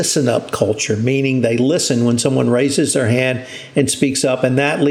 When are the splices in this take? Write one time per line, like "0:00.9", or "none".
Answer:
none